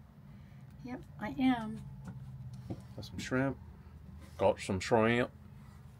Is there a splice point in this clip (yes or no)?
no